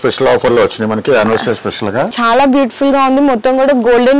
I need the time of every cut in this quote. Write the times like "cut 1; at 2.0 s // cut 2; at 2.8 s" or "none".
cut 1; at 2.1 s